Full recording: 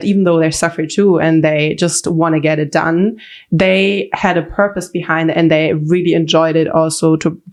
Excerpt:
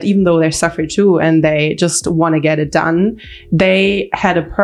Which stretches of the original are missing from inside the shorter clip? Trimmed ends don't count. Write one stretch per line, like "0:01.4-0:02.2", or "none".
none